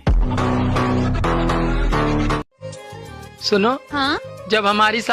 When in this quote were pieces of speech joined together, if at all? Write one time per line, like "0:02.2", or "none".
0:02.5